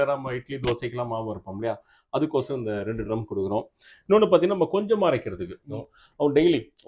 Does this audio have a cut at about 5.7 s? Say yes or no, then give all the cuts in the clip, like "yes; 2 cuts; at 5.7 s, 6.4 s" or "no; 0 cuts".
yes; 1 cut; at 5.7 s